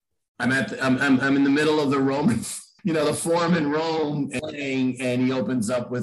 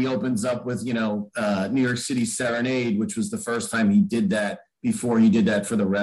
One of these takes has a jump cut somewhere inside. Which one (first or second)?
first